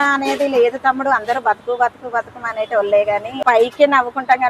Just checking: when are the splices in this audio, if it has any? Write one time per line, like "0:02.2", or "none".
0:03.4